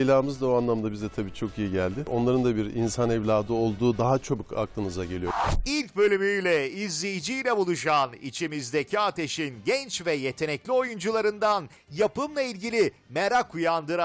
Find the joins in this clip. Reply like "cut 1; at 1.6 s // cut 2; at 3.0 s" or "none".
cut 1; at 2.1 s // cut 2; at 5.3 s